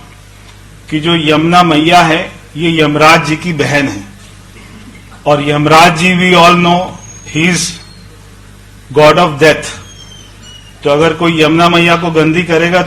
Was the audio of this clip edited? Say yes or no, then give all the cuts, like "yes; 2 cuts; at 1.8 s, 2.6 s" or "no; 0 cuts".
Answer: no; 0 cuts